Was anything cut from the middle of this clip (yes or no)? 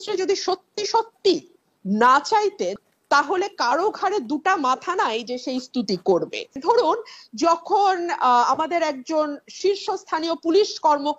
yes